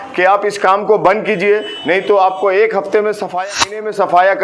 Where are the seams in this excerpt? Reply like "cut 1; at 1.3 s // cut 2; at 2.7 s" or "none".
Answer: cut 1; at 3.5 s